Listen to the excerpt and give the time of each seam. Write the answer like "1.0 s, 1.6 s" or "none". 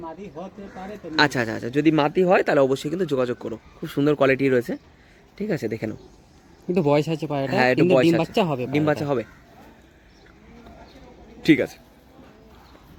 none